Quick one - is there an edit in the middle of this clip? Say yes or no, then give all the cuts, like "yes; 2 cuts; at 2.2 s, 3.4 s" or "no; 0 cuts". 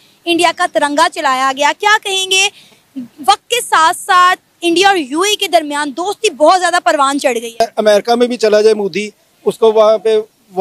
yes; 1 cut; at 7.6 s